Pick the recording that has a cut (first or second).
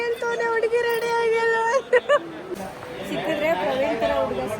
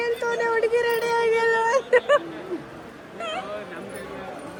first